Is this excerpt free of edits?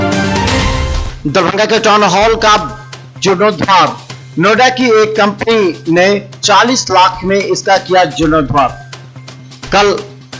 yes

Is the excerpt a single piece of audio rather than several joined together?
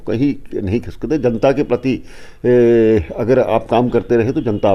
yes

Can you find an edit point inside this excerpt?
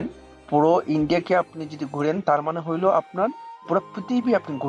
no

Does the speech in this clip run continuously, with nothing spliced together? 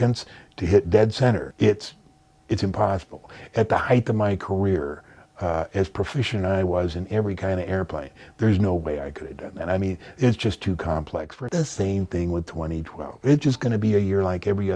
no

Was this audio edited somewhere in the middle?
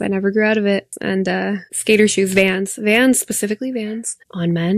yes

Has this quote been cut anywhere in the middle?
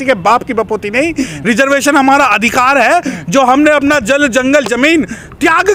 no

